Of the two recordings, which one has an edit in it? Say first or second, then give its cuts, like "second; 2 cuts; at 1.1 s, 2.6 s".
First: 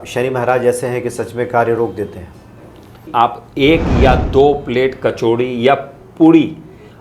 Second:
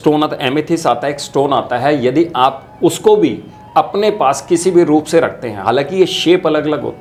first; 1 cut; at 3.1 s